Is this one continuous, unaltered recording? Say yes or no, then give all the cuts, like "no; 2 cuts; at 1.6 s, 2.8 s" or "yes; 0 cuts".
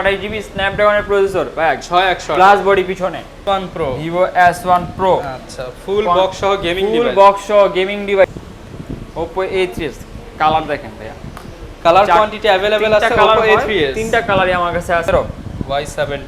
no; 3 cuts; at 3.4 s, 8.2 s, 15.1 s